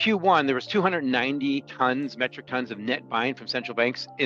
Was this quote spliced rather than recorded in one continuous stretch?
yes; 1 cut; at 1.7 s

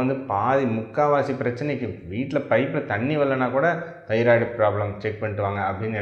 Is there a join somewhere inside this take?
no; 0 cuts

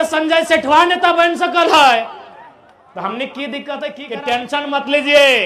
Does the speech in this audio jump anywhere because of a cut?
yes; 1 cut; at 4.0 s

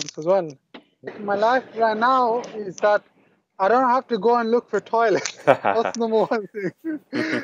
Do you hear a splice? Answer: yes; 1 cut; at 1.2 s

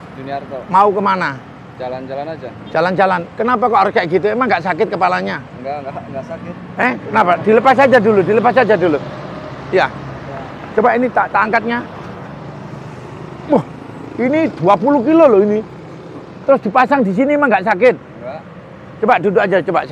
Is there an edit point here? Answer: no; 0 cuts

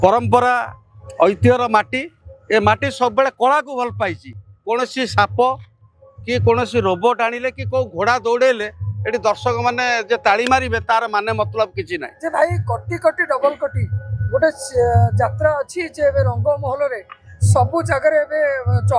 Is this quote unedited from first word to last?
yes; 0 cuts

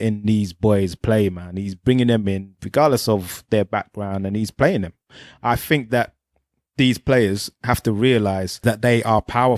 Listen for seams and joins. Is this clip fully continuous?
no; 2 cuts; at 5.1 s, 8.5 s

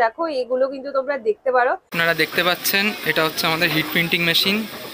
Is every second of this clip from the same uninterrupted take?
no; 1 cut; at 1.9 s

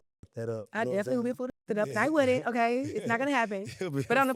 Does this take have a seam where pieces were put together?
no; 0 cuts

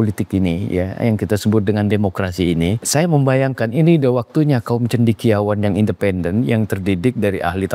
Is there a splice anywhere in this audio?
yes; 1 cut; at 2.8 s

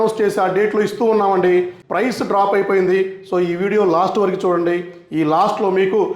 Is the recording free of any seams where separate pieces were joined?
no; 1 cut; at 1.8 s

